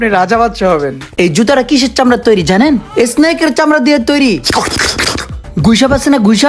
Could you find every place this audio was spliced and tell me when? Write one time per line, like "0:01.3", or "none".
0:01.0

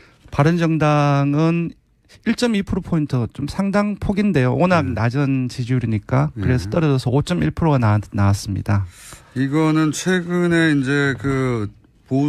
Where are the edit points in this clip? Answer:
none

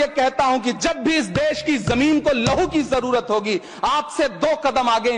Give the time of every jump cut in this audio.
none

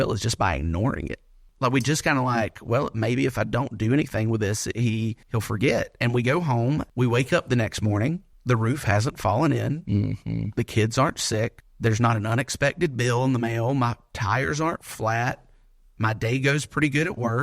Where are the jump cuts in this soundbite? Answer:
0:01.4
0:05.2
0:06.9
0:08.3
0:11.6

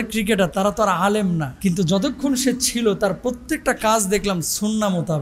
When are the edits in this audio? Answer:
0:01.5

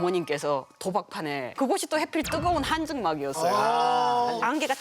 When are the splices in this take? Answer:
0:01.5

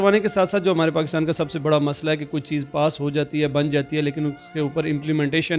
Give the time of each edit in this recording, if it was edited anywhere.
none

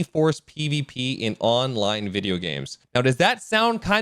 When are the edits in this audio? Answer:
0:02.8

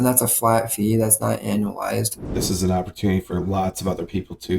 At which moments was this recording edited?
0:02.2

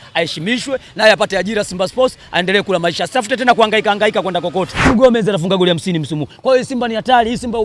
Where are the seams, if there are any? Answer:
0:04.9

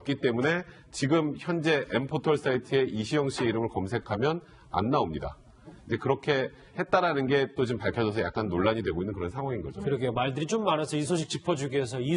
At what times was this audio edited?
none

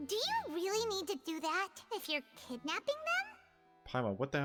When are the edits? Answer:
none

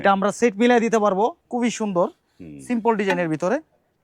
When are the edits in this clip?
0:01.4

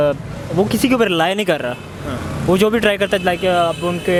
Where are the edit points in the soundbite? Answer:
none

